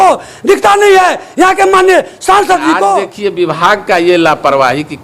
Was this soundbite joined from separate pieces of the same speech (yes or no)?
yes